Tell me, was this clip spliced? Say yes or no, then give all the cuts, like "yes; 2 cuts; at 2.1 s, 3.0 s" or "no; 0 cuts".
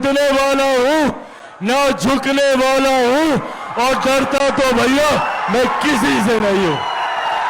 no; 0 cuts